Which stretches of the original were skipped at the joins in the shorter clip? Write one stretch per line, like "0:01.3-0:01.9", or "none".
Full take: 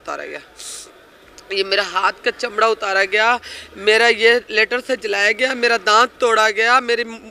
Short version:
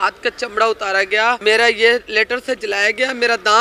0:03.4-0:03.8